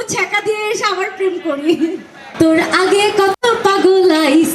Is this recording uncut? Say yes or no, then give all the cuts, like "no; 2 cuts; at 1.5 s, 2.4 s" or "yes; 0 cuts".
yes; 0 cuts